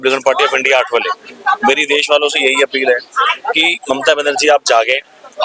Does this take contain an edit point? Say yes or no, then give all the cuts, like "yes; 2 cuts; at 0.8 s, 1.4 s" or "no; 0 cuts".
no; 0 cuts